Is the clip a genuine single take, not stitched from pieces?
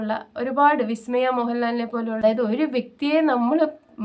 no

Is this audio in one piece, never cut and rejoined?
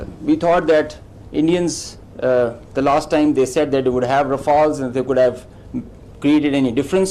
yes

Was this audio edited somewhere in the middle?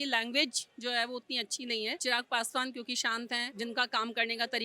yes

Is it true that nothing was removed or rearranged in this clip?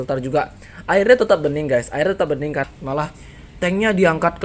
no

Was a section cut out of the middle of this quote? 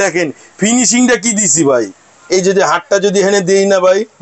yes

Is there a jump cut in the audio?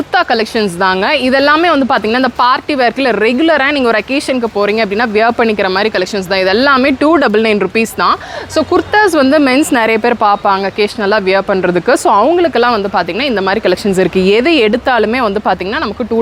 no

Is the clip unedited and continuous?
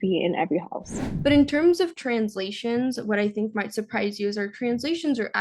no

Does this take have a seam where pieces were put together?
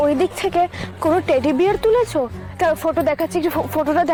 no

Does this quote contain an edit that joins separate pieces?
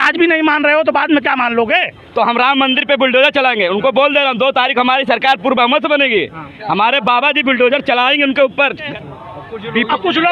yes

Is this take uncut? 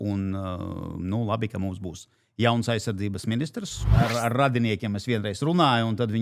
no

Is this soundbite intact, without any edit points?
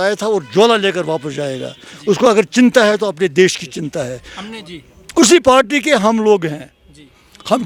yes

